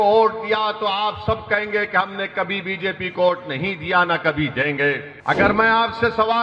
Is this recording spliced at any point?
yes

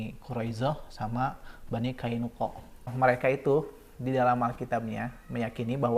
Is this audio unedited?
no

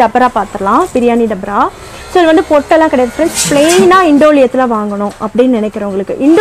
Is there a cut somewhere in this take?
no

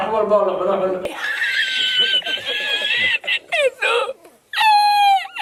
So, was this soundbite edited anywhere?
no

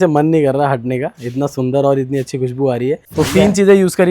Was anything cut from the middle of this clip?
yes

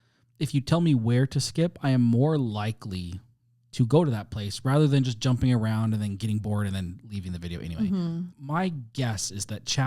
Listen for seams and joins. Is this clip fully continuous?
yes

